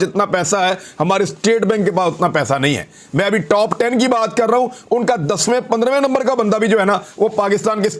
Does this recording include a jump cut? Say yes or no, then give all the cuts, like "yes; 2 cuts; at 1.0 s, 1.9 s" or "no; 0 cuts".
no; 0 cuts